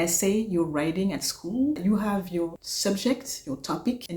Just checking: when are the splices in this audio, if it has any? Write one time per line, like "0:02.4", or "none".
0:01.8